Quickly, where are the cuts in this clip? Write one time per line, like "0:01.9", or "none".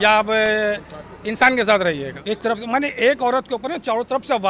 0:02.1